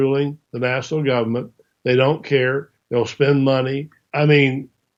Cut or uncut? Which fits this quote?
uncut